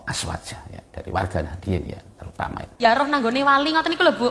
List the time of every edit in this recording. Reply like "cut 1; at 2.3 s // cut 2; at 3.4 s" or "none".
cut 1; at 2.8 s